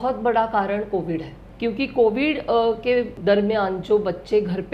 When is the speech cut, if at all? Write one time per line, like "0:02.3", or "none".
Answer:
0:01.4
0:03.1